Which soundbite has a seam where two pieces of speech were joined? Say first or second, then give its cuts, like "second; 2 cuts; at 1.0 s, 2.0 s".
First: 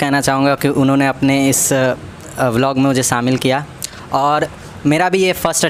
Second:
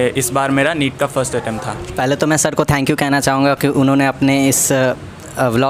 second; 1 cut; at 1.8 s